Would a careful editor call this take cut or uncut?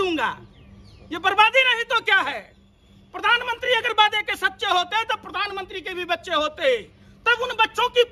uncut